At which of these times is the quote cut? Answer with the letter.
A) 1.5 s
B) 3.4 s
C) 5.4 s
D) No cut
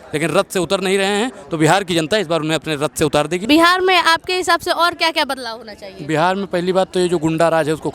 B